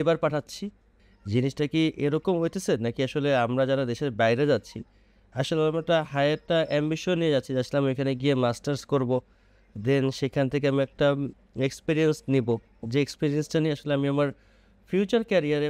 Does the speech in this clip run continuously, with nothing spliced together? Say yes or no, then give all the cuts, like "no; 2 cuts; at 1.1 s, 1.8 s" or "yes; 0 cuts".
yes; 0 cuts